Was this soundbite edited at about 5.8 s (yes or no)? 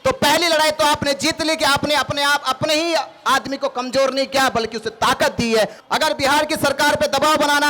yes